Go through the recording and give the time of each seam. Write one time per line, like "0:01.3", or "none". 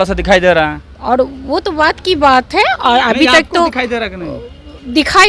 none